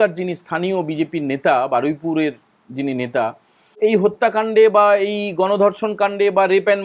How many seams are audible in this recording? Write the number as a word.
one